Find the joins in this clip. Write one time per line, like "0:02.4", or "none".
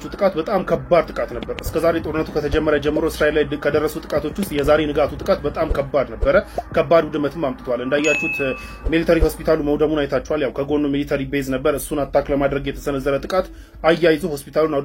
none